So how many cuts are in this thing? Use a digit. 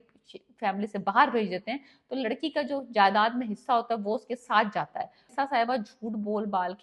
1